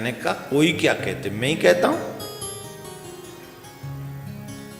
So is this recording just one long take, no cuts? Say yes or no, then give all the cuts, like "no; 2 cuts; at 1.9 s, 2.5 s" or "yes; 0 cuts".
yes; 0 cuts